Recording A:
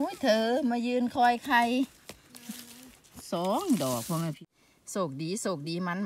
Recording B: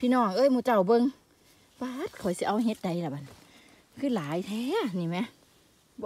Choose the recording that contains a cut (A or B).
A